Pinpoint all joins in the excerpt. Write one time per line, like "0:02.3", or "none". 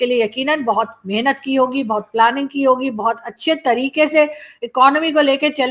none